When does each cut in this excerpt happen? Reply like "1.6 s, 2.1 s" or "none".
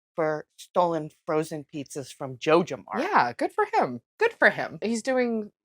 4.0 s, 4.8 s